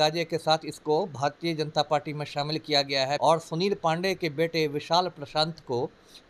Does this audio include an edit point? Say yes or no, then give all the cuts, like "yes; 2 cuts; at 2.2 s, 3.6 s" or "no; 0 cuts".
yes; 1 cut; at 3.2 s